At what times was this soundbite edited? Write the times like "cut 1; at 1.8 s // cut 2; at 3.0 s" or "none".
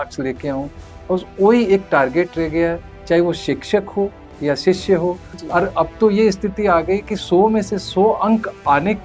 cut 1; at 5.3 s